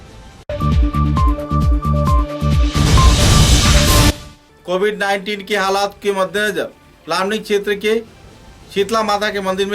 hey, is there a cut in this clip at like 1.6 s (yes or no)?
no